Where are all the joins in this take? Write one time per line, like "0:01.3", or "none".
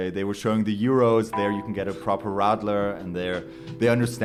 none